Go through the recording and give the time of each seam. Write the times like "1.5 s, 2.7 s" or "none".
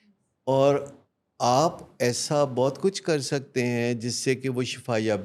none